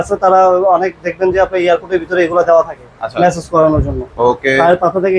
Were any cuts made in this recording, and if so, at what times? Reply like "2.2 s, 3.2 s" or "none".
none